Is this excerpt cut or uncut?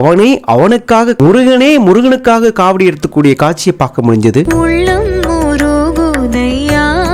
cut